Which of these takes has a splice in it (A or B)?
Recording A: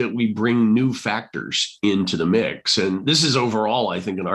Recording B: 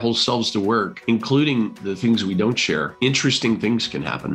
B